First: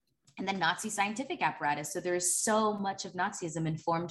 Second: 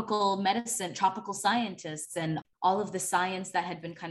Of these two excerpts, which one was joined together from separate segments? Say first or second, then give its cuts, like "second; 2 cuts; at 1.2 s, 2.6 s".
second; 1 cut; at 2.4 s